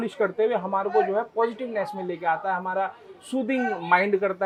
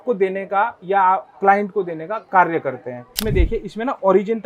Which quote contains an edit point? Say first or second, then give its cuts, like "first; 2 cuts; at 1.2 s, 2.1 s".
second; 2 cuts; at 2.1 s, 3.1 s